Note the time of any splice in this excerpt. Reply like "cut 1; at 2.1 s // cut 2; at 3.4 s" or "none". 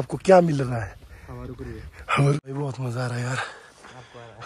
cut 1; at 2.4 s